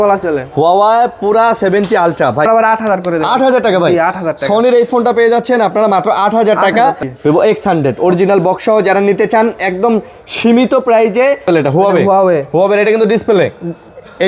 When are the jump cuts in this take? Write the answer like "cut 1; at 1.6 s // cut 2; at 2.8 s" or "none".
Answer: cut 1; at 2.5 s // cut 2; at 7.0 s // cut 3; at 11.5 s